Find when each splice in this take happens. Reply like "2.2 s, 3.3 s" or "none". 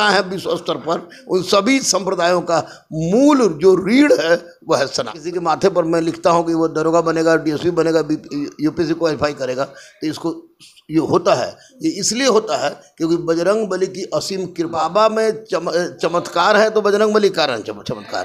5.3 s, 14.7 s